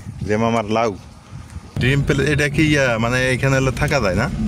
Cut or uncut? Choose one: cut